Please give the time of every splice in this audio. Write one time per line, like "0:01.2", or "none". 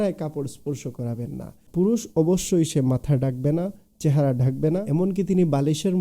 0:01.6
0:04.9